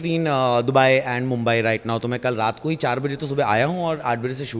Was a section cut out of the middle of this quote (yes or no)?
no